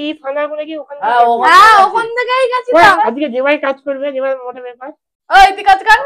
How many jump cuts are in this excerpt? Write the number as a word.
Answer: one